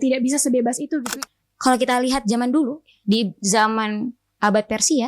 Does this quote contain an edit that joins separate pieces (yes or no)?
yes